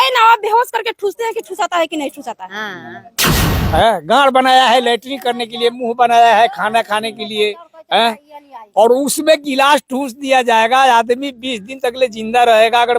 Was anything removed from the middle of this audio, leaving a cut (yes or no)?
yes